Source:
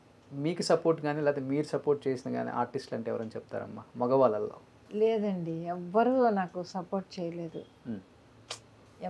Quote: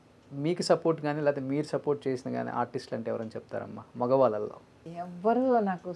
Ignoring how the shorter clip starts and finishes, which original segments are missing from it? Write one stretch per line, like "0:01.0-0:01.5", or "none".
0:04.8-0:05.5